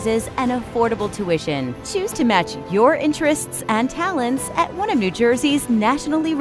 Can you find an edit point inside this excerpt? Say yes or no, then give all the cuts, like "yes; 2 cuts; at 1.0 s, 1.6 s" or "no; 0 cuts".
no; 0 cuts